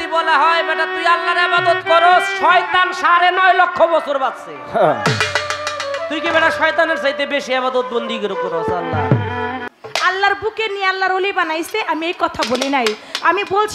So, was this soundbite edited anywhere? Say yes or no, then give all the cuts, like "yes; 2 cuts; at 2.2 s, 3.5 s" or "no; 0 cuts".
yes; 1 cut; at 9.6 s